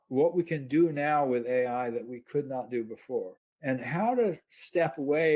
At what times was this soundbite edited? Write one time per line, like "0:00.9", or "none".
0:03.4